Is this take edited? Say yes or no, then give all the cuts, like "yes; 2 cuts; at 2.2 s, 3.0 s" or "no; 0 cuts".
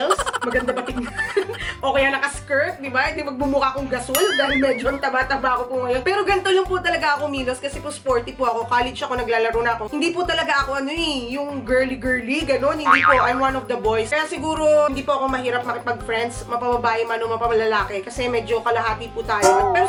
no; 0 cuts